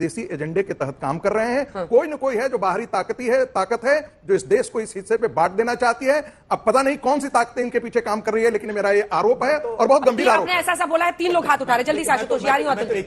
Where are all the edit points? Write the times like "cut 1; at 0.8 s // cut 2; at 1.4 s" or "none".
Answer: none

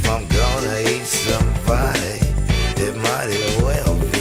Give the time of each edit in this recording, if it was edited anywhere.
none

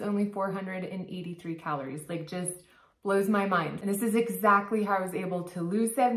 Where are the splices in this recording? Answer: cut 1; at 3.7 s

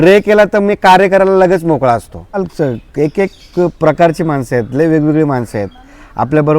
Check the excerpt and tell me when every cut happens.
cut 1; at 2.4 s

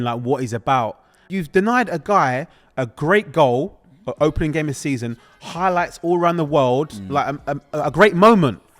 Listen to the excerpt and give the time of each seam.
cut 1; at 1.2 s

